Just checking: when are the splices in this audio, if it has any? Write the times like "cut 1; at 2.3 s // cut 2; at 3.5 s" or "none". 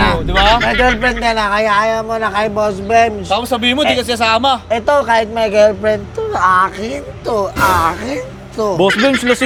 none